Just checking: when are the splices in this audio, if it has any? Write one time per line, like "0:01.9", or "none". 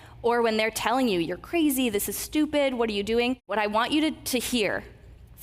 0:03.5